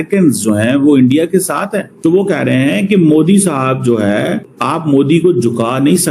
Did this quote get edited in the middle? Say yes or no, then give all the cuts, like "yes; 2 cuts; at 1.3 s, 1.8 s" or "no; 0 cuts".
yes; 2 cuts; at 1.9 s, 4.5 s